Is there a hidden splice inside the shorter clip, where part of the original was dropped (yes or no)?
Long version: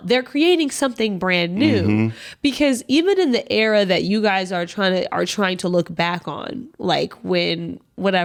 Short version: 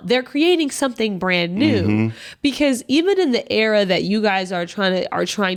no